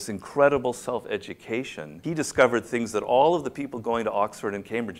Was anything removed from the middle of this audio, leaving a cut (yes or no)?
yes